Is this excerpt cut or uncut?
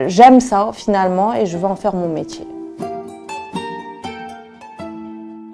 cut